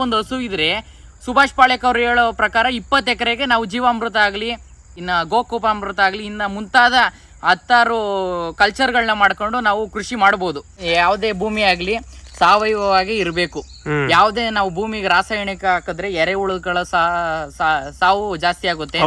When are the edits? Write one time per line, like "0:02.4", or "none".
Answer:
0:05.0
0:10.8